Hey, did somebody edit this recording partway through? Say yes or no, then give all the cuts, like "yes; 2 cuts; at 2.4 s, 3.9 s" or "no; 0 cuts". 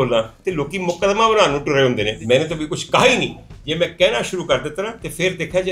yes; 1 cut; at 2.1 s